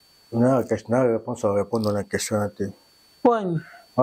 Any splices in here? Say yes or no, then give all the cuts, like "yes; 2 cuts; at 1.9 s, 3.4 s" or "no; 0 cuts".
no; 0 cuts